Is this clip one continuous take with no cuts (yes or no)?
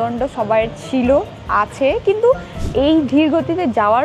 no